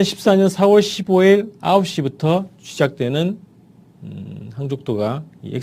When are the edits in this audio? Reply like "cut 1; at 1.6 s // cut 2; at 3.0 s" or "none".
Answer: cut 1; at 1.9 s